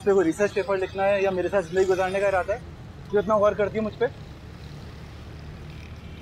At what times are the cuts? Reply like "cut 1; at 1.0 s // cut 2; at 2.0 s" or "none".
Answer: none